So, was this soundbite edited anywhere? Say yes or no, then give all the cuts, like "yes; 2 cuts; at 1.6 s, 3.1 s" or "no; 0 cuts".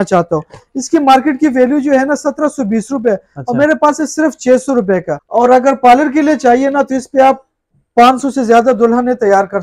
yes; 1 cut; at 5.2 s